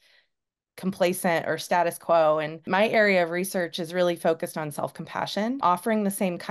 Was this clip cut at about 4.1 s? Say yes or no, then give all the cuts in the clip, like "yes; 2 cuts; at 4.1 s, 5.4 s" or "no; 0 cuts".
no; 2 cuts; at 2.6 s, 5.6 s